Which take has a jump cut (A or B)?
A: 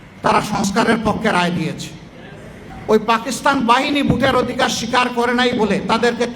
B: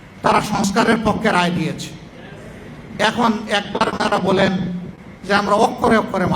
A